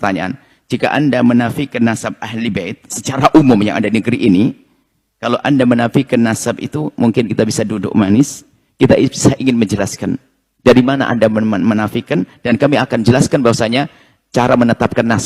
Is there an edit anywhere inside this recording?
no; 0 cuts

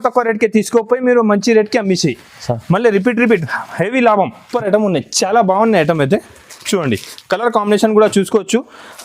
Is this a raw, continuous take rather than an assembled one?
no; 1 cut; at 4.4 s

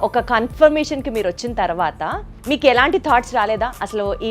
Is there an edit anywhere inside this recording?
yes; 1 cut; at 2.3 s

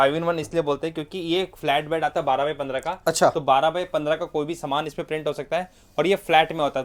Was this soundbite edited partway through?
no; 0 cuts

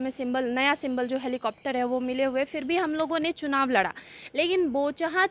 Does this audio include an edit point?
no; 0 cuts

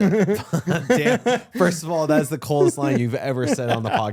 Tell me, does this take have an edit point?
no; 0 cuts

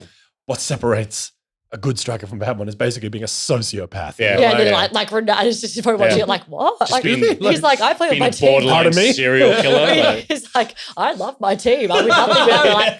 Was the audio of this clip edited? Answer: no; 0 cuts

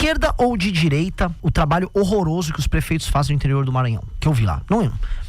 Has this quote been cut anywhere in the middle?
yes; 1 cut; at 1.4 s

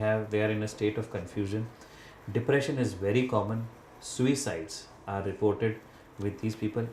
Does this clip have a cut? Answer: no; 0 cuts

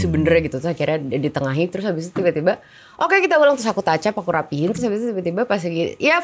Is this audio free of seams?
yes; 0 cuts

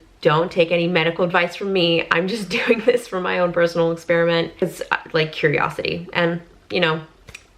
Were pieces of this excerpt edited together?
yes; 1 cut; at 4.6 s

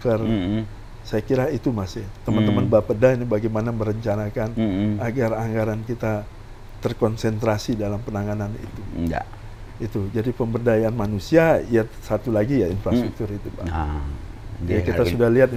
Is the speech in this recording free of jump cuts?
yes; 0 cuts

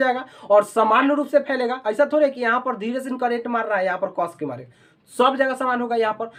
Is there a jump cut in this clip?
no; 0 cuts

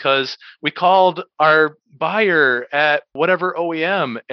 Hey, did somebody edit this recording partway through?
yes; 1 cut; at 3.1 s

